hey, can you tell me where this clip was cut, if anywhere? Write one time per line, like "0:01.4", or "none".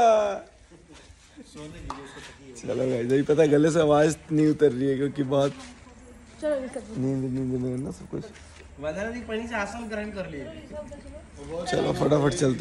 none